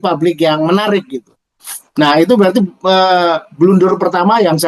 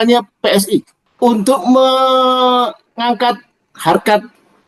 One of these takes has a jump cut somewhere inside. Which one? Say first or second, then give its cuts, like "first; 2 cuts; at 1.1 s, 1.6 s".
second; 1 cut; at 1.0 s